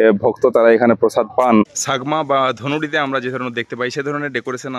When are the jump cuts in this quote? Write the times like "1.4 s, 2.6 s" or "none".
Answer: 1.8 s